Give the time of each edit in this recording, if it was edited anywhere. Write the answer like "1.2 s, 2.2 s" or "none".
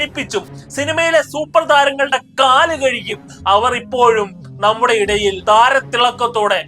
5.4 s